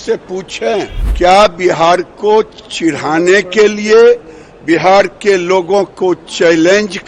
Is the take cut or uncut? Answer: cut